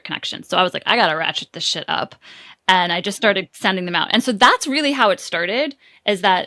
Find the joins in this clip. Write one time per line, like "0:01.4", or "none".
none

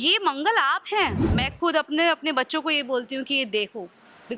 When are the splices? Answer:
0:01.3

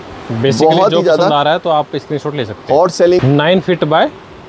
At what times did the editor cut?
0:03.2

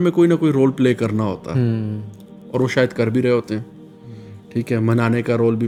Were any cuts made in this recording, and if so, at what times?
none

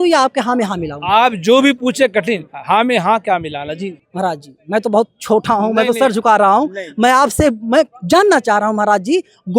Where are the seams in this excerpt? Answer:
0:03.8

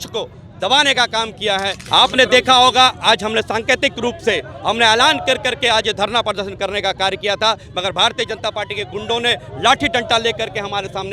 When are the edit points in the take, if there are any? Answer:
0:01.8

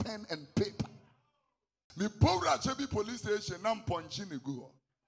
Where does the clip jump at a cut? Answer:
0:01.8

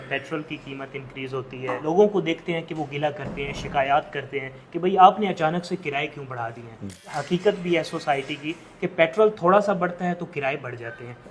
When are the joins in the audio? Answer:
0:01.7
0:07.1

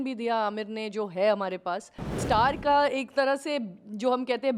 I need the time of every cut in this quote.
0:02.2

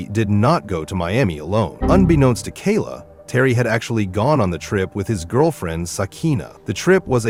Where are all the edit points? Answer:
none

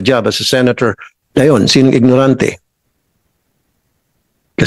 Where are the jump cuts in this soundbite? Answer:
0:01.1

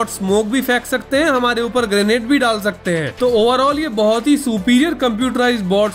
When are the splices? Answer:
none

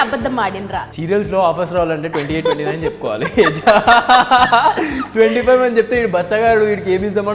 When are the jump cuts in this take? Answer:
0:00.9

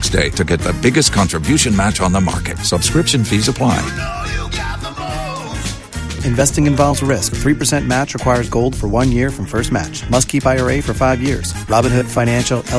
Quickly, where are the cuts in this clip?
none

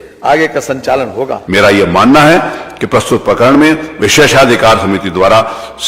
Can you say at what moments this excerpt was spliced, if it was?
0:01.4

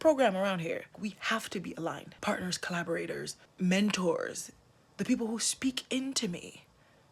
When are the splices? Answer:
0:01.0
0:02.1
0:03.4

